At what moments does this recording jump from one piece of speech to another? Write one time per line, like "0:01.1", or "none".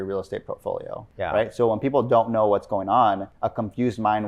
0:01.0
0:03.3